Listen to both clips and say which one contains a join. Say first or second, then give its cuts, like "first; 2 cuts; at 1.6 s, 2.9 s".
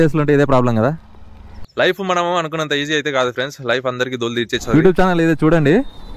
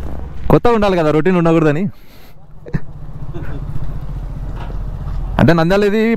first; 2 cuts; at 1.6 s, 4.7 s